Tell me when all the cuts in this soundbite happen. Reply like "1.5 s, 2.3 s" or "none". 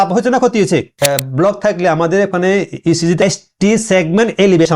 0.9 s, 3.2 s